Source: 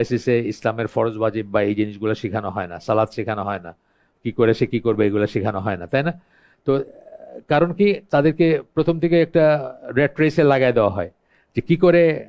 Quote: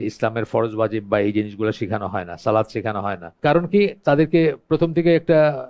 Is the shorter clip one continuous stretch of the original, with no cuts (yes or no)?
no